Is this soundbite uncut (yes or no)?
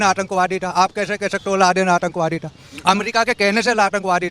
yes